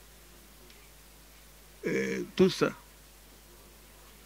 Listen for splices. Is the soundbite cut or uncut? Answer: uncut